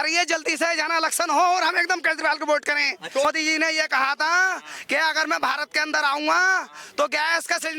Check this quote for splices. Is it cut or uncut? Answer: cut